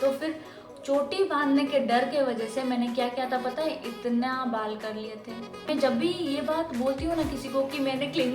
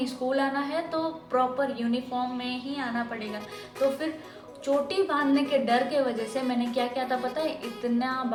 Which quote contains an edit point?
first; 1 cut; at 5.5 s

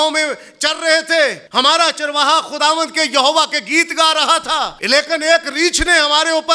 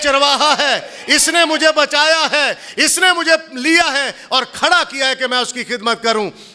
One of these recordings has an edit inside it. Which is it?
first; 2 cuts; at 1.4 s, 4.8 s

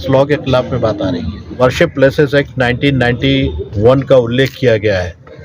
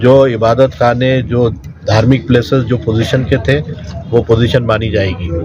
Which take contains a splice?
first; 1 cut; at 1.5 s

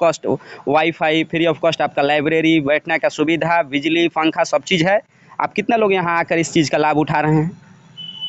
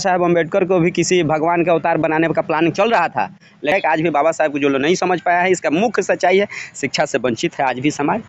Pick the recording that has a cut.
second; 1 cut; at 3.7 s

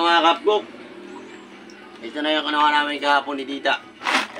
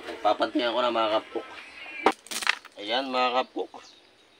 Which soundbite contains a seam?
second; 1 cut; at 2.1 s

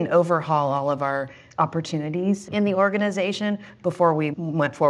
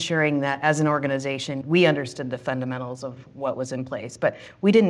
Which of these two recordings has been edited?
first; 2 cuts; at 1.4 s, 2.5 s

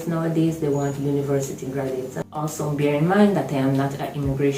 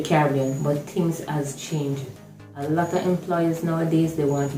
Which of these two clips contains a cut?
first; 1 cut; at 2.2 s

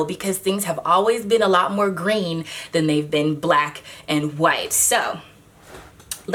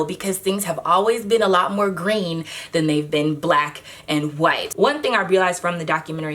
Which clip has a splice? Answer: second; 1 cut; at 4.7 s

